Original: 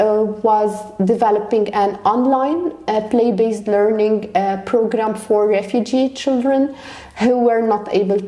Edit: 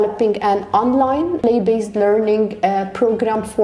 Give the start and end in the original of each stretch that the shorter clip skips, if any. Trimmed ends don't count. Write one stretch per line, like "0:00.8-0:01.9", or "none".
0:02.7-0:03.1